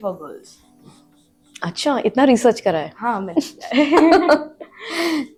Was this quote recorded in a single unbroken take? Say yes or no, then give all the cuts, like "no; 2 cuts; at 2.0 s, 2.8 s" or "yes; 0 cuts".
yes; 0 cuts